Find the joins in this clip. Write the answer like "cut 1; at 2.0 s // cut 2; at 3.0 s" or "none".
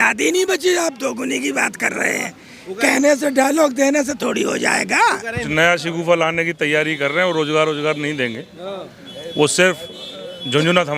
cut 1; at 5.3 s